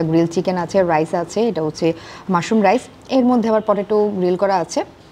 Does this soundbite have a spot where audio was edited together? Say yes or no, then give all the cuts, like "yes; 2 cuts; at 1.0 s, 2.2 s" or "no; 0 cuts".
no; 0 cuts